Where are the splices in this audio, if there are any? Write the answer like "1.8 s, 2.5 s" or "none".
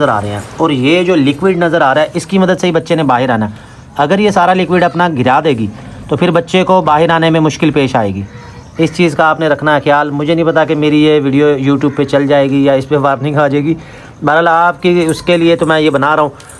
none